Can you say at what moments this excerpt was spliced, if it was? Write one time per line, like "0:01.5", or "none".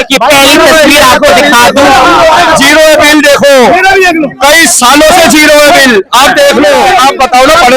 0:06.8

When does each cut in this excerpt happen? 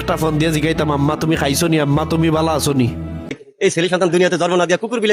0:03.4

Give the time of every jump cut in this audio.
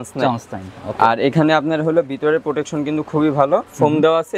none

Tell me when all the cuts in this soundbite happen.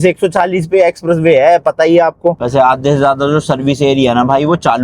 0:02.3

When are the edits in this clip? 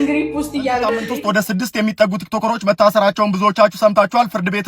0:00.9

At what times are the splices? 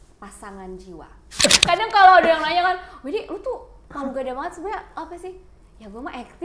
0:01.4

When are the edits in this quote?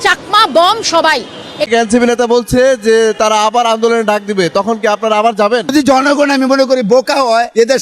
0:01.6

